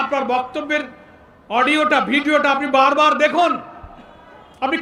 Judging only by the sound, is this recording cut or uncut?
uncut